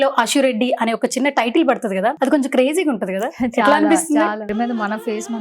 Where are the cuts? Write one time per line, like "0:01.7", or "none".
0:02.2
0:04.5